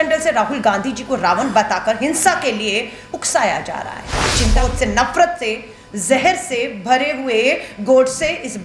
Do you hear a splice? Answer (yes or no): yes